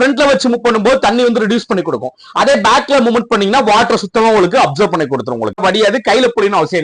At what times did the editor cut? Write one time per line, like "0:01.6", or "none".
0:05.6